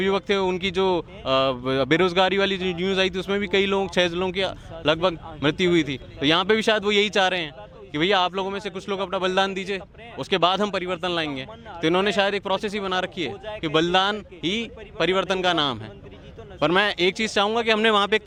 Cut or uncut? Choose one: uncut